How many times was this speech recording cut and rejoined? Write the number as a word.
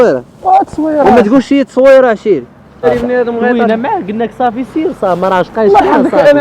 one